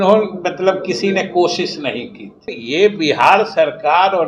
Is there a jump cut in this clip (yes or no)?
yes